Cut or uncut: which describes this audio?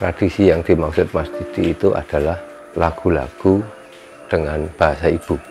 cut